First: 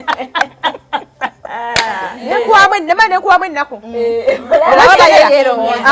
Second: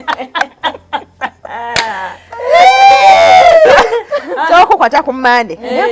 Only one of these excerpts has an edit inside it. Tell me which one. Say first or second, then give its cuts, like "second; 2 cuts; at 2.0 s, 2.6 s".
first; 1 cut; at 2.2 s